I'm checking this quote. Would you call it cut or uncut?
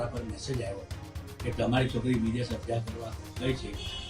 uncut